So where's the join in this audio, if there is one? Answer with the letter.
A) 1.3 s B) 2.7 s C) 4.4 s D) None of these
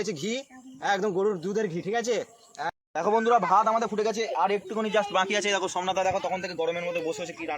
B